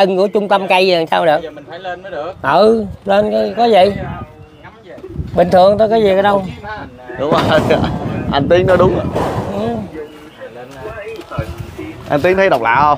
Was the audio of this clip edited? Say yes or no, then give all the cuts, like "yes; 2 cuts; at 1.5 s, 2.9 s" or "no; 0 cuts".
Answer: no; 0 cuts